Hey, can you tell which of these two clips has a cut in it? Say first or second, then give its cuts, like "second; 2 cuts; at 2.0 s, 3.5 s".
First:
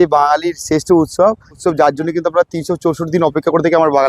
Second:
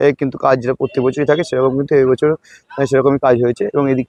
first; 1 cut; at 1.6 s